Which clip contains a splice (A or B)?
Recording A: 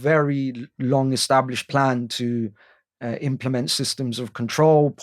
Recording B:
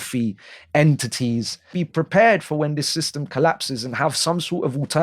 B